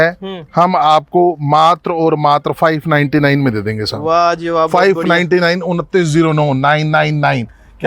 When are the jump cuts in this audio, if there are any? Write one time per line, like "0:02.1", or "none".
none